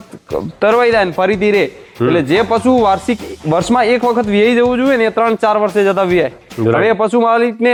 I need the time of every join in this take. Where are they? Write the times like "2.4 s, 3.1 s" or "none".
none